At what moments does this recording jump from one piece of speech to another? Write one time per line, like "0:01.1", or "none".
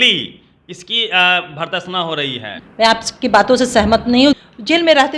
0:02.5
0:04.4